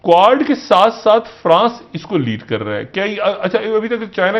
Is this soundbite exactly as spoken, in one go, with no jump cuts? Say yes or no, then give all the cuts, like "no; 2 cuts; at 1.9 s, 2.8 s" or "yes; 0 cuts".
yes; 0 cuts